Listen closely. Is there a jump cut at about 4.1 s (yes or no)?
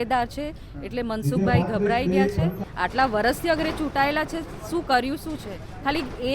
no